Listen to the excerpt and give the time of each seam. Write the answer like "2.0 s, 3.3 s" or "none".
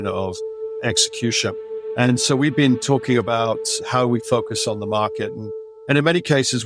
1.7 s, 3.7 s